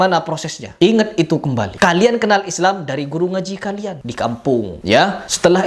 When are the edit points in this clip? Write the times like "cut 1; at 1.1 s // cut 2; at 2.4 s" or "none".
none

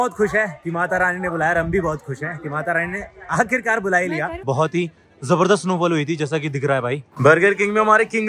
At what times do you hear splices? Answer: cut 1; at 4.4 s // cut 2; at 7.1 s

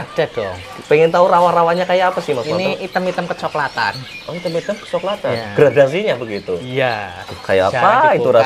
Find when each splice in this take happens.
none

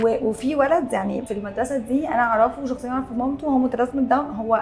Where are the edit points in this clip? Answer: cut 1; at 1.3 s

